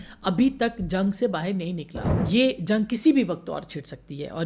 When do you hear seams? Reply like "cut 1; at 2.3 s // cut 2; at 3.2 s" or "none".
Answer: cut 1; at 2.1 s